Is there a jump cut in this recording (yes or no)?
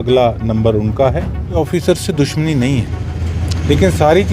yes